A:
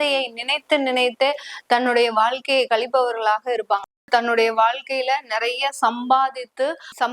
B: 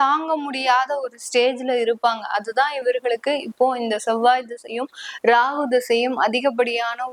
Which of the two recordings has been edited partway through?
A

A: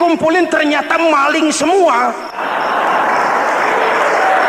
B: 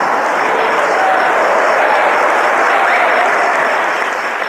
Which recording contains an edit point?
A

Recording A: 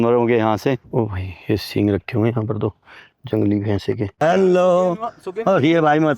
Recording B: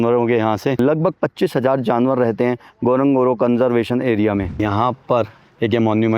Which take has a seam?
A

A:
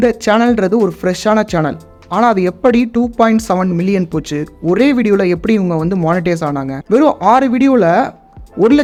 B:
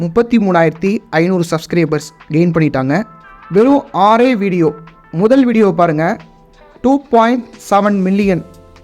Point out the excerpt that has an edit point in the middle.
B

